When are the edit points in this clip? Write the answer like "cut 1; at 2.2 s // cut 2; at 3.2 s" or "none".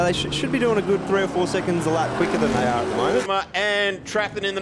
cut 1; at 3.3 s